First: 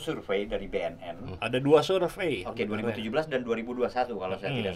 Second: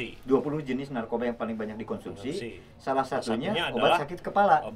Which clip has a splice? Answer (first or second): first